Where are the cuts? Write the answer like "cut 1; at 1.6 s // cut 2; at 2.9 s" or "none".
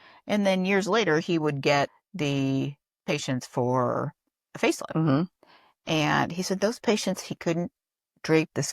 cut 1; at 2.0 s